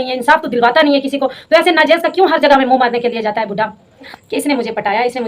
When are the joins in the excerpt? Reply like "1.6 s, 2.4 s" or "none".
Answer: 4.1 s